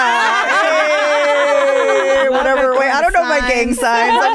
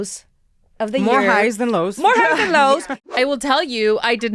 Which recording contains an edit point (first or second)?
second